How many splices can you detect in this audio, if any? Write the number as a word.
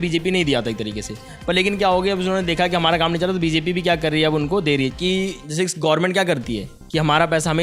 one